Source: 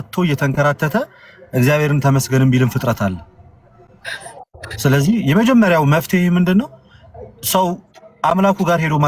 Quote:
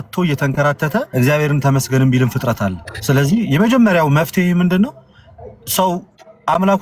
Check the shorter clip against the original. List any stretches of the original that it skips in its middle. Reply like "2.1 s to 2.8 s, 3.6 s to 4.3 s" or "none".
1.1 s to 1.5 s, 3.3 s to 4.6 s